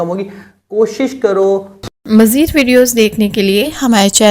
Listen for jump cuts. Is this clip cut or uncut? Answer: cut